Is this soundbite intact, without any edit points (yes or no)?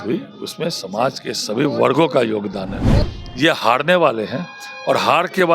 no